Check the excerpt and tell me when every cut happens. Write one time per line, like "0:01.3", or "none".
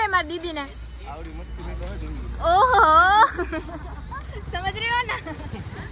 0:02.7